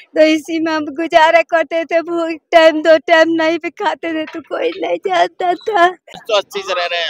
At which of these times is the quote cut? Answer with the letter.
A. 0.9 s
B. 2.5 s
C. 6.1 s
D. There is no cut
C